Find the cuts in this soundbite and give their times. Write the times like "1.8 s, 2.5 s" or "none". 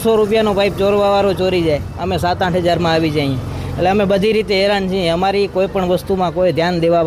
none